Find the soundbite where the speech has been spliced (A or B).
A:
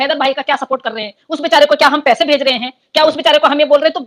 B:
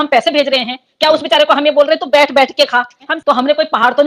B